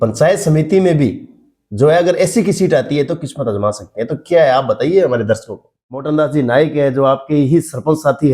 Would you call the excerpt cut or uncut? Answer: cut